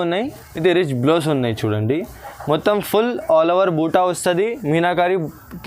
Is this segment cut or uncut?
uncut